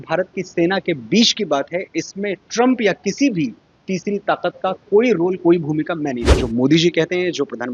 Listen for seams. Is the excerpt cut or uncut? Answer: cut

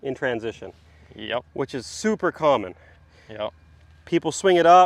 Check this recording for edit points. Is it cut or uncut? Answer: uncut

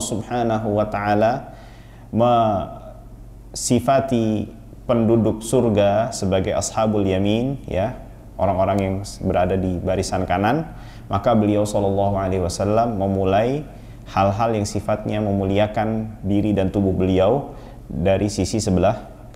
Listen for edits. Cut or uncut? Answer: uncut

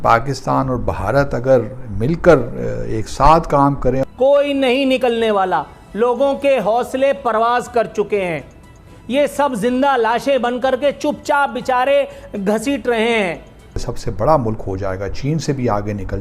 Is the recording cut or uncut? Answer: cut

